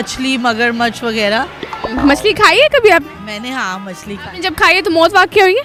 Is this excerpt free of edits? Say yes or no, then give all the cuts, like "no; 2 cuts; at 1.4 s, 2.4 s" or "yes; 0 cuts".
yes; 0 cuts